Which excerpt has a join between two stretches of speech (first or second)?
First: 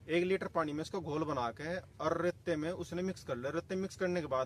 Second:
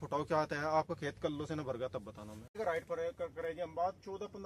second